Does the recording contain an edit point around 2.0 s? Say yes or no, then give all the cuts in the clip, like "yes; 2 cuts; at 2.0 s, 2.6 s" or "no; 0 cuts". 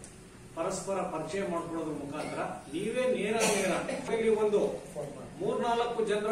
no; 1 cut; at 4.1 s